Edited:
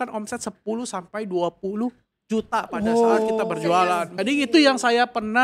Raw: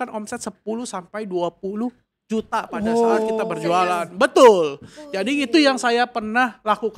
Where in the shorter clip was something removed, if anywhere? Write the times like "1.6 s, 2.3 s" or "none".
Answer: 4.0 s

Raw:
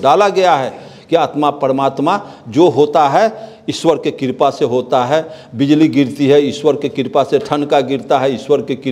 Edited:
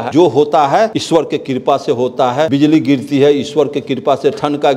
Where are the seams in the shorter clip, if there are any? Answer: 1.0 s, 2.5 s

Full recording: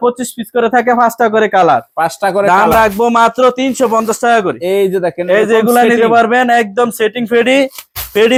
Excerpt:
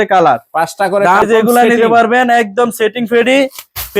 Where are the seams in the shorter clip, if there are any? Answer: 1.2 s

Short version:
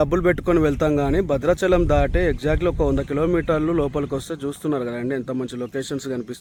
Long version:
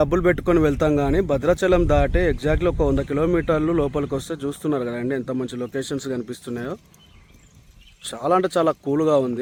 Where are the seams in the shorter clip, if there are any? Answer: none

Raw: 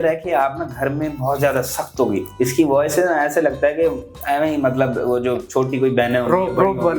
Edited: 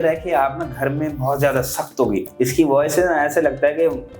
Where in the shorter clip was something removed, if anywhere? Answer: none

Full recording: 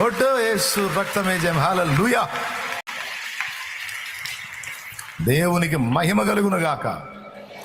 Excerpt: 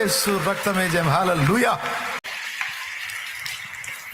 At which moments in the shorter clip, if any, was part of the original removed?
2.2 s

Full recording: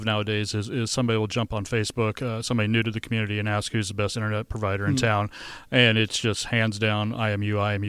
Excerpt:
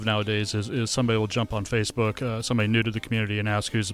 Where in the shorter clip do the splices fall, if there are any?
none

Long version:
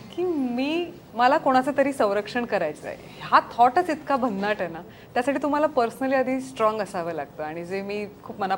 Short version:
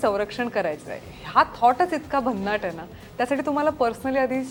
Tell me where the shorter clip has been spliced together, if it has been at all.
none

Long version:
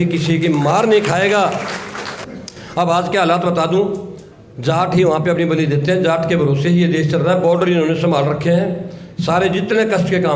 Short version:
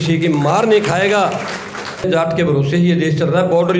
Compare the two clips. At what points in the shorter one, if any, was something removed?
2.0 s

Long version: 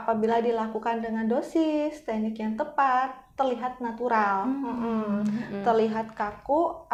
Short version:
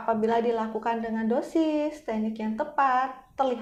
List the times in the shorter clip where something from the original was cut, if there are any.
none

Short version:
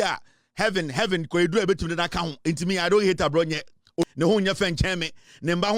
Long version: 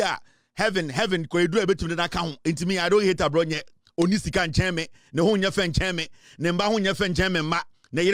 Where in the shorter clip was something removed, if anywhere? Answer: 4.0 s

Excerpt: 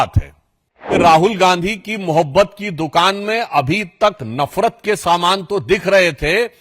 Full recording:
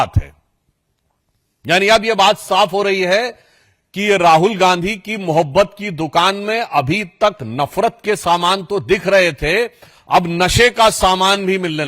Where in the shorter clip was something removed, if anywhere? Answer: 1.0 s

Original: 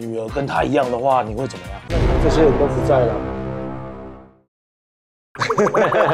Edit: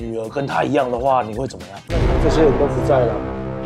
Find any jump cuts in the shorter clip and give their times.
none

